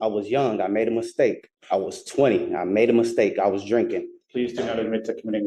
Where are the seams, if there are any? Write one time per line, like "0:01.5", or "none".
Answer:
0:01.5
0:04.2